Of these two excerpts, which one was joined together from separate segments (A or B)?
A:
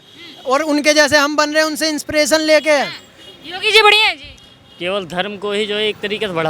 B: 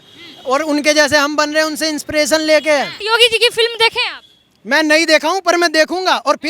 B